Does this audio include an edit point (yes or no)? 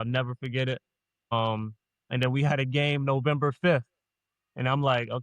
no